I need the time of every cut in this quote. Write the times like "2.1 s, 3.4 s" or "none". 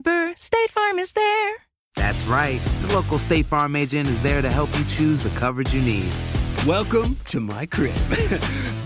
none